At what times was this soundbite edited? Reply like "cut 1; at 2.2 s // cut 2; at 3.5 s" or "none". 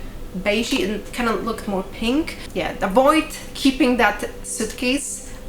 cut 1; at 2.4 s

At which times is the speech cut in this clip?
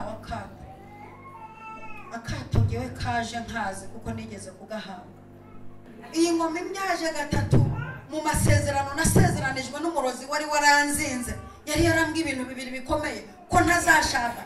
cut 1; at 5.9 s

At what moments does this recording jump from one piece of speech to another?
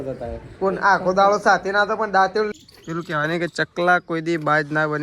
cut 1; at 2.5 s

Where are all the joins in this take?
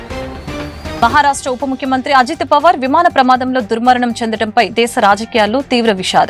cut 1; at 0.9 s

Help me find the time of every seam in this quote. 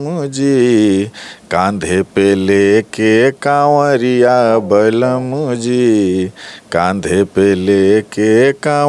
none

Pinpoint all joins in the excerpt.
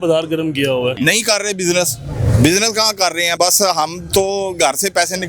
cut 1; at 0.9 s // cut 2; at 3.3 s

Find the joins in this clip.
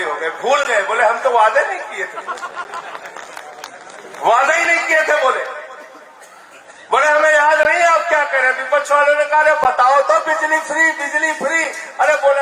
none

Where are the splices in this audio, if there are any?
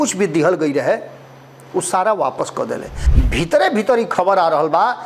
cut 1; at 3.0 s

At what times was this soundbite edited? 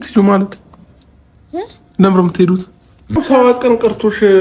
cut 1; at 3.2 s

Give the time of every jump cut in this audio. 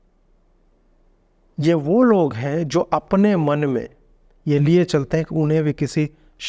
none

